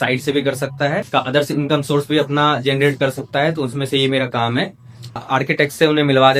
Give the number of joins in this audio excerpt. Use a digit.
2